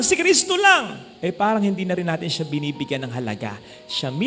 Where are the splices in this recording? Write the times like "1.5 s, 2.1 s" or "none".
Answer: none